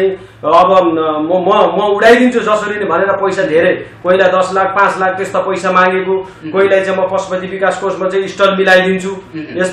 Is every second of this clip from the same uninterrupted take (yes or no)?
yes